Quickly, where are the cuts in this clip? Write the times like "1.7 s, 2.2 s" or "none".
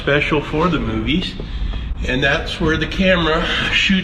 none